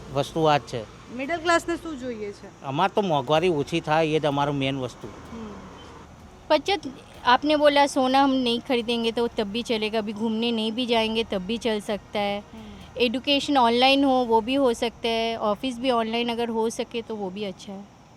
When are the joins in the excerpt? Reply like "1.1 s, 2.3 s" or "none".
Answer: 6.1 s